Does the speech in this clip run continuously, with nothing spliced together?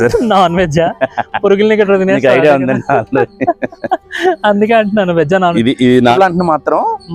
no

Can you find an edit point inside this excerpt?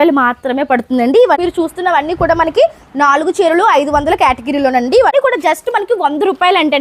yes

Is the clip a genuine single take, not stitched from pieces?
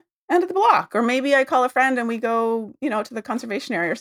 yes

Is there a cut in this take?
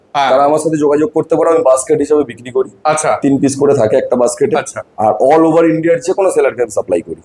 no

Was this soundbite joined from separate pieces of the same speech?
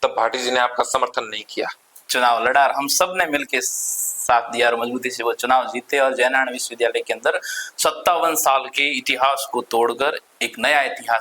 yes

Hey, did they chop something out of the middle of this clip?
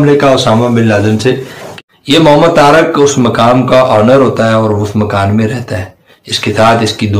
yes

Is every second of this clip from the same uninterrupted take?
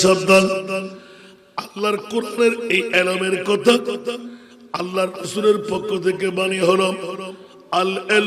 yes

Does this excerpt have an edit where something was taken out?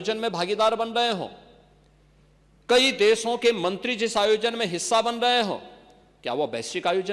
no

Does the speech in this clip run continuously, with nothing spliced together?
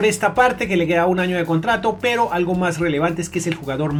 yes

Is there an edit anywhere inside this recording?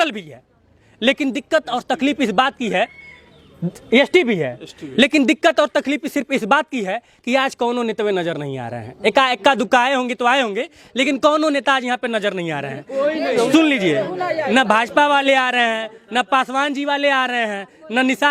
no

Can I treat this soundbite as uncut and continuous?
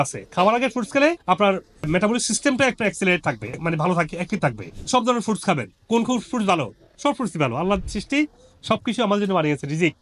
yes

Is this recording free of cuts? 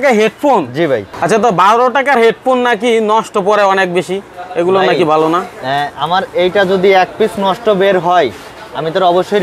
yes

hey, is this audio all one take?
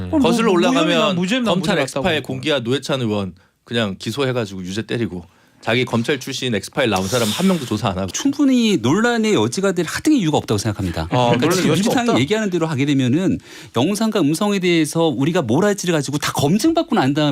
no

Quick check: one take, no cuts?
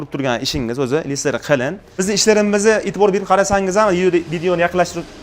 no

